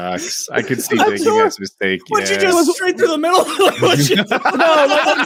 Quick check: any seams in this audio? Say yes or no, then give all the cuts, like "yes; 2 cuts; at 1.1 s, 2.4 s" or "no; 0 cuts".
no; 0 cuts